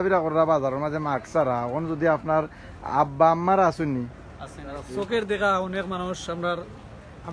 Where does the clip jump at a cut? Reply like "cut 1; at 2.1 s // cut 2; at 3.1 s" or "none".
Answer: cut 1; at 4.9 s